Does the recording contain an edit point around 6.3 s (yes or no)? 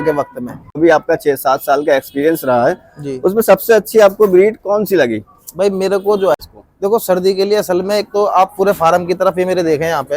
yes